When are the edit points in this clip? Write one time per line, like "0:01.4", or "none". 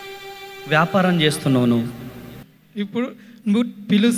0:02.6